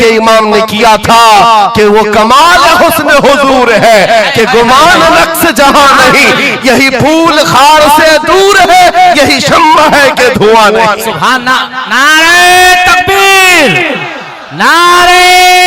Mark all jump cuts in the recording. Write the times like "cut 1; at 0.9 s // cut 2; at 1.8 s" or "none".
none